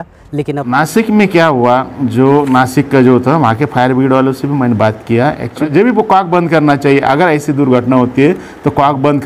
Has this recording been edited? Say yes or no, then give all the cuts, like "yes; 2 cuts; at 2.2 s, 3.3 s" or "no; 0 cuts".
yes; 2 cuts; at 0.7 s, 5.7 s